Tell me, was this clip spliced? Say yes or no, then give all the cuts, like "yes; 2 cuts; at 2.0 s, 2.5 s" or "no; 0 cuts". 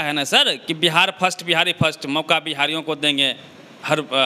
no; 0 cuts